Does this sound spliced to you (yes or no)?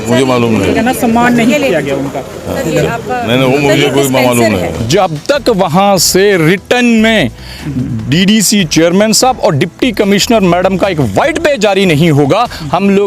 yes